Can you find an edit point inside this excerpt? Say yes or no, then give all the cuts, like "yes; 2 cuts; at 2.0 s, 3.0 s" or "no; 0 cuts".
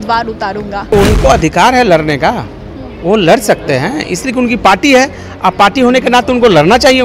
yes; 1 cut; at 0.9 s